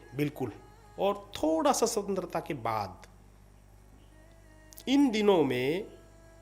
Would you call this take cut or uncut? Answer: uncut